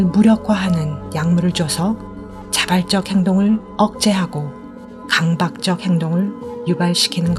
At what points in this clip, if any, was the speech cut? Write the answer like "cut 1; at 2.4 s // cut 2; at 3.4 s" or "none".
none